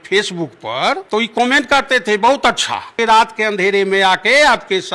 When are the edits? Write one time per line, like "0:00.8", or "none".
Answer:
0:01.0
0:02.9